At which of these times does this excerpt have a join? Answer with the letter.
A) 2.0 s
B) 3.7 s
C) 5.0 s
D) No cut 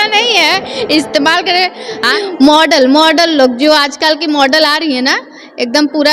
A